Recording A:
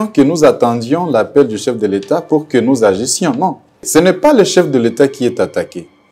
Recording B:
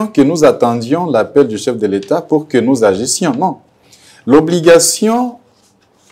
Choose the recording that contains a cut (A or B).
A